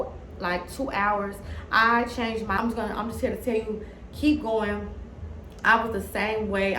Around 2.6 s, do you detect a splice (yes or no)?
yes